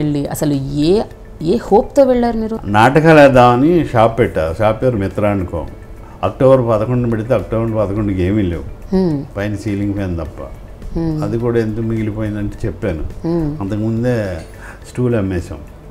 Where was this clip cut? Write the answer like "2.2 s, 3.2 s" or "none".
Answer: 2.6 s